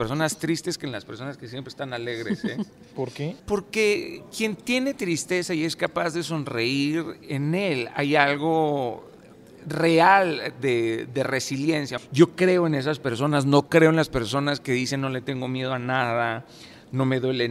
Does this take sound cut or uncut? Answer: cut